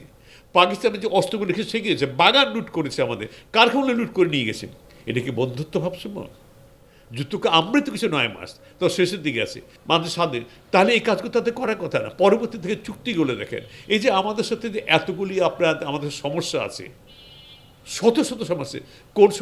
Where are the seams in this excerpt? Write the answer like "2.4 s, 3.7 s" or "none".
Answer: 9.7 s